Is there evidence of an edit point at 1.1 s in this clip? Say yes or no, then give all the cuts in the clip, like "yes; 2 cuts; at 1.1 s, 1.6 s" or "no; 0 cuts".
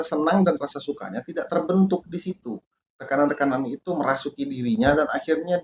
no; 1 cut; at 3.0 s